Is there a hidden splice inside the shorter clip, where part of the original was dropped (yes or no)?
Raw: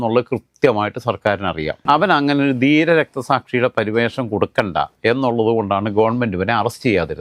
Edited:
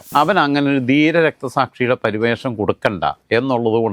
no